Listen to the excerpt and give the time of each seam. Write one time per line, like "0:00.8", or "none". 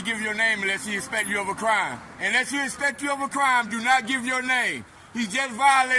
0:02.1